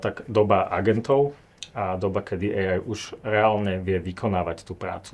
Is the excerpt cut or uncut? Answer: uncut